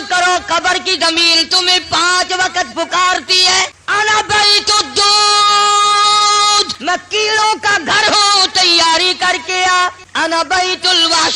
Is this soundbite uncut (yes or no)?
no